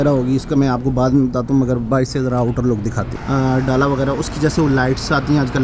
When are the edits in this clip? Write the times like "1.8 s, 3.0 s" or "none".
3.1 s

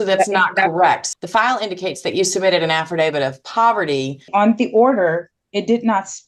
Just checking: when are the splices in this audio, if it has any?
1.0 s, 4.3 s

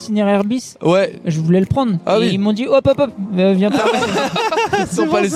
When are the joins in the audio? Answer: none

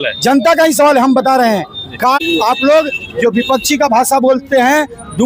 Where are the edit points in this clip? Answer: 2.2 s

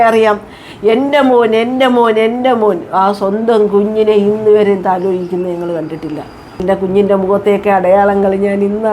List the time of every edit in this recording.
6.6 s

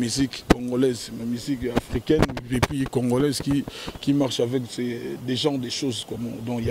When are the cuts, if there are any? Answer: none

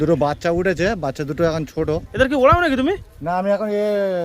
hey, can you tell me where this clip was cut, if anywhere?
2.1 s

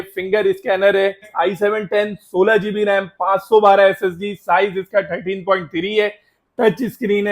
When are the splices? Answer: 1.3 s

